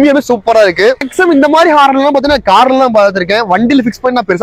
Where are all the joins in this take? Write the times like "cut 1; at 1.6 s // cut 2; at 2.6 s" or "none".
cut 1; at 1.1 s